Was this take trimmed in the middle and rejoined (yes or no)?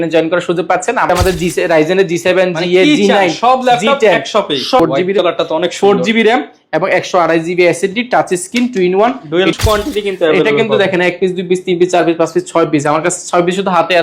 yes